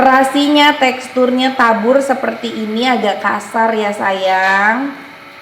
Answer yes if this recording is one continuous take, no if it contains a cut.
yes